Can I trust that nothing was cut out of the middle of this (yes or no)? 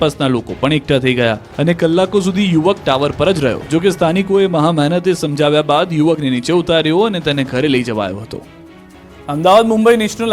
yes